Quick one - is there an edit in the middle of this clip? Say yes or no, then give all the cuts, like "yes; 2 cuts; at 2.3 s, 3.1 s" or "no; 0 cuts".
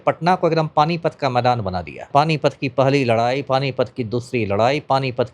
yes; 1 cut; at 2.1 s